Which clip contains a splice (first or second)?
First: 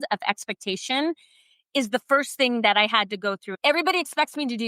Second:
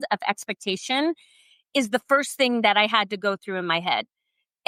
first